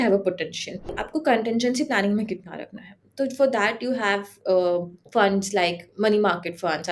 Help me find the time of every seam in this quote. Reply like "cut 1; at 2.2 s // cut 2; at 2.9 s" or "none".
cut 1; at 1.0 s

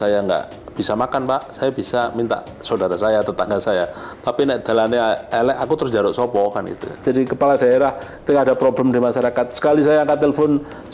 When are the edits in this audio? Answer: cut 1; at 7.0 s

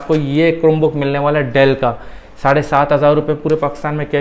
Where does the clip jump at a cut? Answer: none

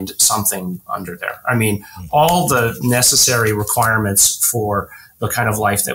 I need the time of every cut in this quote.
none

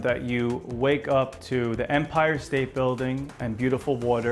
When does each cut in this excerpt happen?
none

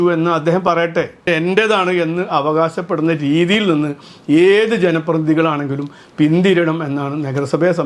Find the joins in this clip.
cut 1; at 1.3 s

